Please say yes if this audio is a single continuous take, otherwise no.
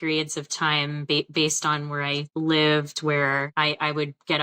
no